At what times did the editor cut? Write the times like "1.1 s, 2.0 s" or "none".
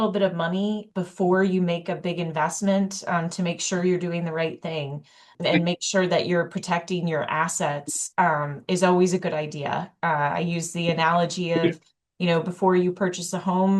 none